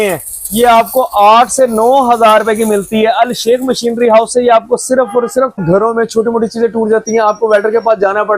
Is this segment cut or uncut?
cut